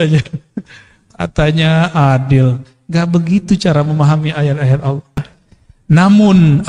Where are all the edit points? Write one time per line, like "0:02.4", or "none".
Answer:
0:05.1